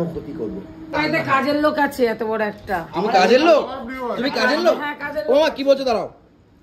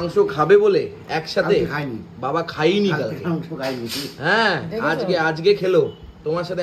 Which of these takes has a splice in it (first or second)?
first